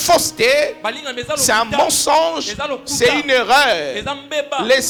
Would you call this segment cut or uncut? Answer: uncut